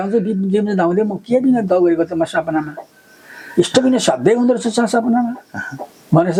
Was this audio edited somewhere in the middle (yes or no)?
no